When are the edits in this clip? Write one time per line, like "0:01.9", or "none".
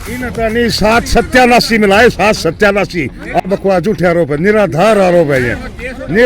0:03.4